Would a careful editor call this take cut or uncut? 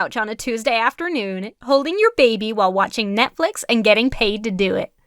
cut